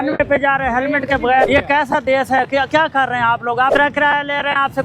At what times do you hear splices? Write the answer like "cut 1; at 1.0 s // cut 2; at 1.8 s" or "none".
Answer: cut 1; at 1.5 s // cut 2; at 3.7 s